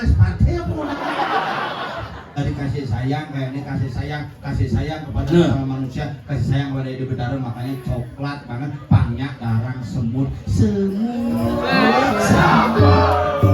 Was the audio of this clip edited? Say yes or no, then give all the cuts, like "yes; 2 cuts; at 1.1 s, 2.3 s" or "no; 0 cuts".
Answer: yes; 1 cut; at 2.4 s